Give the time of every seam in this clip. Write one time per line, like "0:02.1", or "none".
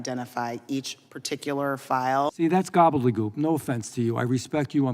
0:02.3